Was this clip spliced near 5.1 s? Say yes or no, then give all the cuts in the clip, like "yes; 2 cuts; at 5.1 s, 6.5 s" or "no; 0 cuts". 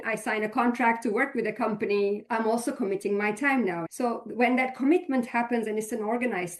no; 2 cuts; at 2.2 s, 3.8 s